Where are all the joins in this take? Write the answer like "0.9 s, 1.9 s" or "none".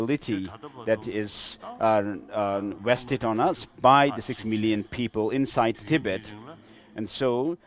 none

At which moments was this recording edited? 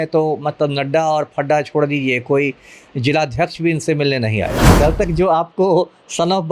4.6 s

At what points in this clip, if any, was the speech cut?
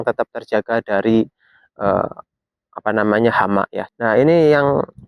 3.8 s

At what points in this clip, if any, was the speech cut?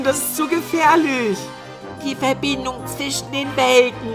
none

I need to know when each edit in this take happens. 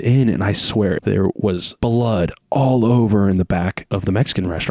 none

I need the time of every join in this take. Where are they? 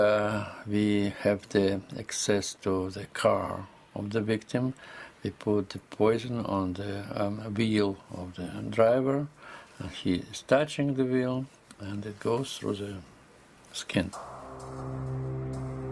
none

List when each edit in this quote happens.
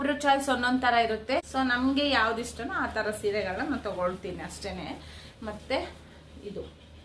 none

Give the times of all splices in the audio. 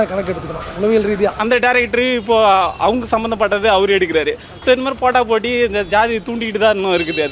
1.4 s

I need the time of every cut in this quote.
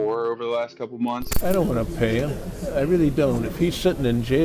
1.3 s

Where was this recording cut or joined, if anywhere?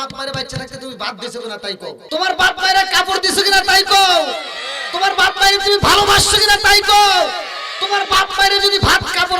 2.0 s

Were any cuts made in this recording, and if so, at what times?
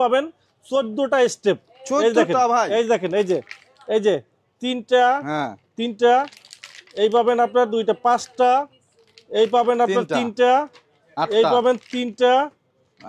none

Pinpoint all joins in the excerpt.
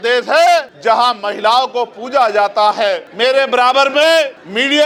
none

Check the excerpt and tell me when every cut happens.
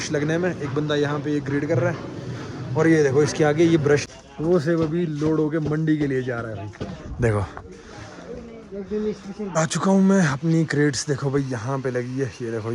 4.0 s, 9.6 s

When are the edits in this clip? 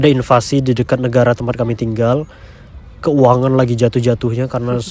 none

